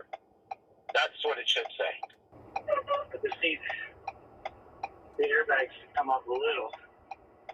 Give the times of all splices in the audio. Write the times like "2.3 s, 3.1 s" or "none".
2.4 s

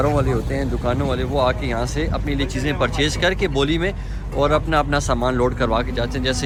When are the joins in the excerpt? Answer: none

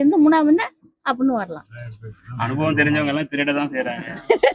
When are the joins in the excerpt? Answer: none

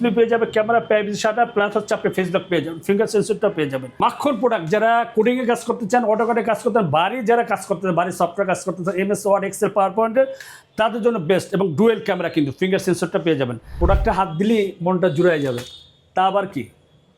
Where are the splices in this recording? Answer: 3.8 s, 13.7 s

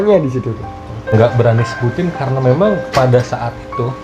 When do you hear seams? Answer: 1.1 s

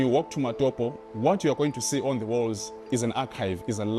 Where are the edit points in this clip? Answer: 2.7 s

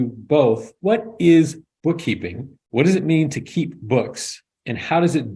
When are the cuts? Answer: none

